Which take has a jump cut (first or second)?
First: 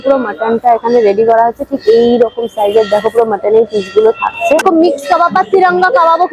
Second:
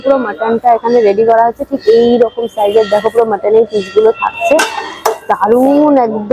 first